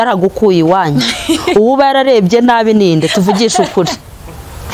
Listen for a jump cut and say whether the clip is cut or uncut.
uncut